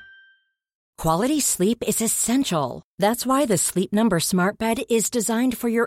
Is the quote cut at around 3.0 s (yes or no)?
no